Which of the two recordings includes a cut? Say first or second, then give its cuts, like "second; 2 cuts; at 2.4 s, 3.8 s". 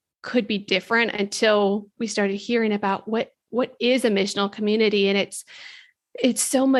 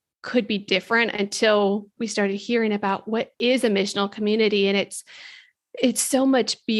second; 1 cut; at 3.3 s